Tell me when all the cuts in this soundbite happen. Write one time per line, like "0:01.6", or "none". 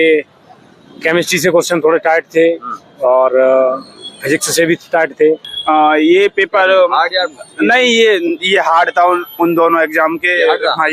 0:05.5

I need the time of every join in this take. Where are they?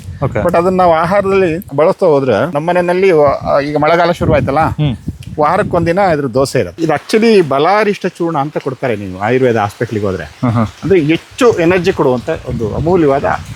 0:01.6
0:02.5
0:06.7

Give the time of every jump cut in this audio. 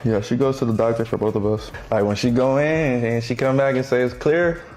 0:01.7

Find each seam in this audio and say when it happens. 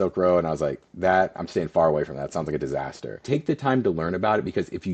0:03.2

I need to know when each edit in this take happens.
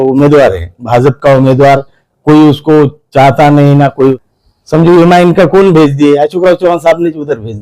0:04.2

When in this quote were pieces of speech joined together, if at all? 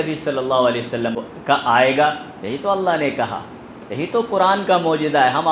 0:01.2

